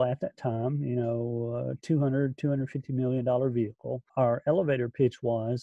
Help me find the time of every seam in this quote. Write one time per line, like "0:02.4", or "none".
0:04.1